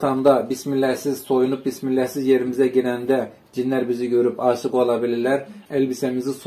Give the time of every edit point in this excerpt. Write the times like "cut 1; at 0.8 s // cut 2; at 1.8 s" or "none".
cut 1; at 5.6 s